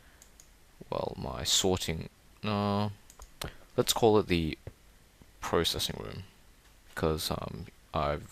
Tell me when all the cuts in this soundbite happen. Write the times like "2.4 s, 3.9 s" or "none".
3.9 s

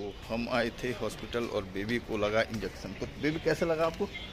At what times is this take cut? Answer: none

